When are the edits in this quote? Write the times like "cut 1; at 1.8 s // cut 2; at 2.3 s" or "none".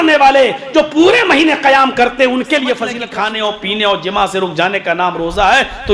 cut 1; at 3.0 s